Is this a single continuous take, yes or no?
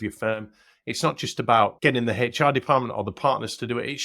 no